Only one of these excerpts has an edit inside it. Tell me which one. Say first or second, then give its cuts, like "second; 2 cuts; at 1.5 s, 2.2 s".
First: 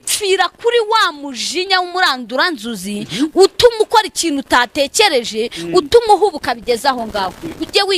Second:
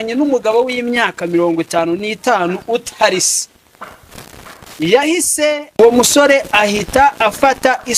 second; 1 cut; at 5.8 s